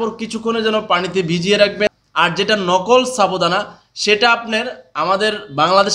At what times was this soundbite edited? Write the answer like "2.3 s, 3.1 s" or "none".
1.9 s